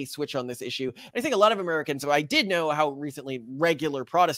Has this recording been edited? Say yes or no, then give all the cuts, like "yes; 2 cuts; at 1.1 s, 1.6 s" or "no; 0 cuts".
no; 0 cuts